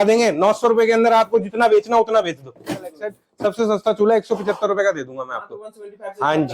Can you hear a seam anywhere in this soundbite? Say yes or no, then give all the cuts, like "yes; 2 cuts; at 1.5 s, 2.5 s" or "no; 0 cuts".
yes; 1 cut; at 3.0 s